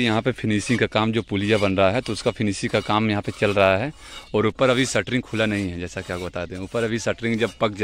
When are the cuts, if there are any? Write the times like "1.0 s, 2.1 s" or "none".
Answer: none